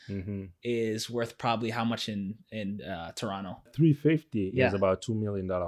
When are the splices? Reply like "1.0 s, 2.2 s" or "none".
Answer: 3.7 s